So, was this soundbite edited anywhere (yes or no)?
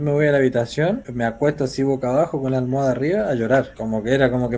yes